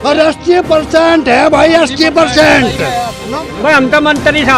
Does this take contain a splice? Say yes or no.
yes